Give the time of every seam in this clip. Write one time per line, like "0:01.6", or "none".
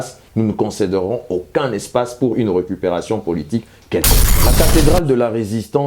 0:04.4